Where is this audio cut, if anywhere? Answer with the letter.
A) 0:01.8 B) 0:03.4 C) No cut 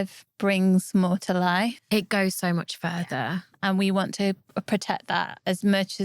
B